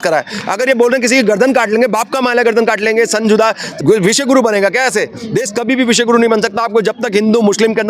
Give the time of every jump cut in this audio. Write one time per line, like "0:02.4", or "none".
0:03.7

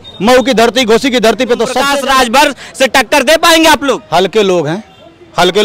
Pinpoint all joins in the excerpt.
0:01.9

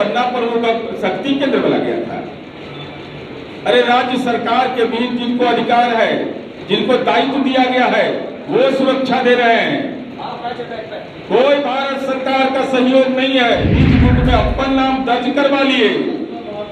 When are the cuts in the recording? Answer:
0:13.7

